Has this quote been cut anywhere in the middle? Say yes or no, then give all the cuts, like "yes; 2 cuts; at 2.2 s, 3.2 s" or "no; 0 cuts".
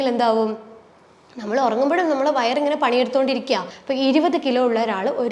yes; 1 cut; at 3.7 s